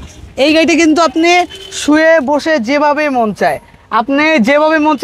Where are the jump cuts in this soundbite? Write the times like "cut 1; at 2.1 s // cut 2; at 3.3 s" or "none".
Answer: none